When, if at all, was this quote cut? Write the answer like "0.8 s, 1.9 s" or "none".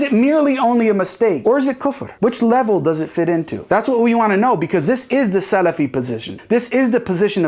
1.4 s, 6.3 s